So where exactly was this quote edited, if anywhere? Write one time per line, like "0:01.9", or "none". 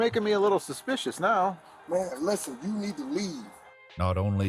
none